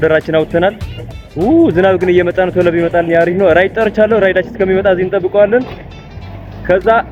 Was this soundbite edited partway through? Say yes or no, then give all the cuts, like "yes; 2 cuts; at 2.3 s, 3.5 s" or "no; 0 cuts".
no; 0 cuts